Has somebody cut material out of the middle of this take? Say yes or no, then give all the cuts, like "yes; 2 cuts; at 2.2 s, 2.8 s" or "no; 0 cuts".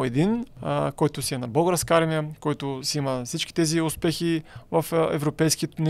no; 0 cuts